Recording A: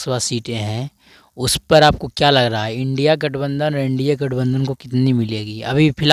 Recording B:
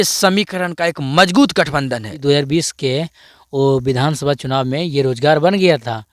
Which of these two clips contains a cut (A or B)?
B